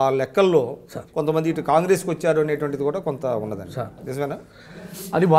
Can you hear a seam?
no; 0 cuts

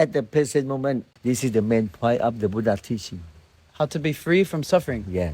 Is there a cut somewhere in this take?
yes; 1 cut; at 1.1 s

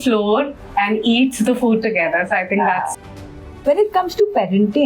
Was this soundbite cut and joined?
yes; 1 cut; at 3.3 s

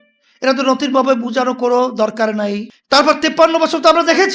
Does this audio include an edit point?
yes; 1 cut; at 2.7 s

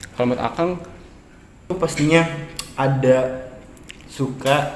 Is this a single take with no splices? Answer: no; 1 cut; at 1.7 s

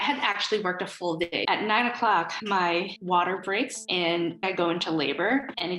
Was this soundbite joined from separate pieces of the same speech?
yes; 2 cuts; at 1.5 s, 4.4 s

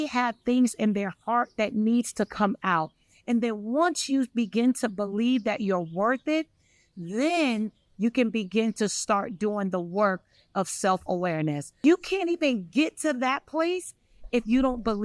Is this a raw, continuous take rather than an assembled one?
no; 1 cut; at 11.7 s

